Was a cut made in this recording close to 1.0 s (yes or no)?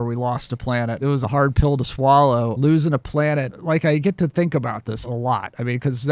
yes